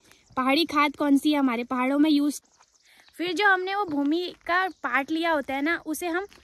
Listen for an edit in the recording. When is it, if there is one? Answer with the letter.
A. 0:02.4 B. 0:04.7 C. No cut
A